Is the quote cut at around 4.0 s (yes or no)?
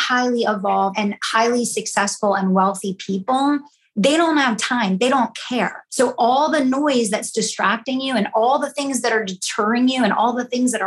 no